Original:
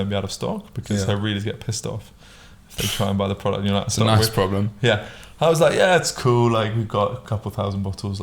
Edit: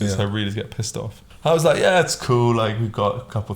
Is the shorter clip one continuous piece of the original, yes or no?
no